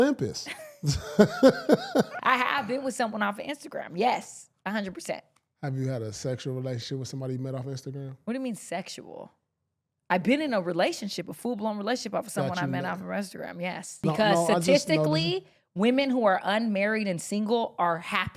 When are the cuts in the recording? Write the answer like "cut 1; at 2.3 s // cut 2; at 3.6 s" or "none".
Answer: cut 1; at 2.1 s // cut 2; at 13.9 s